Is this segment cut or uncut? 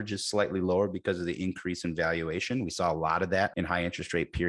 cut